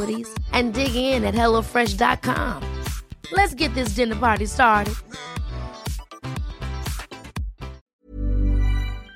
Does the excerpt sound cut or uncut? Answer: cut